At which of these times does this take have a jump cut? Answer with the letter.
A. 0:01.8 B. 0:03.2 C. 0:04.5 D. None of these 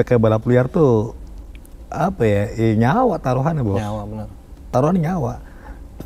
C